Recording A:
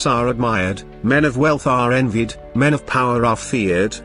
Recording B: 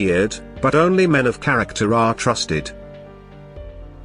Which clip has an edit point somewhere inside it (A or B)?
B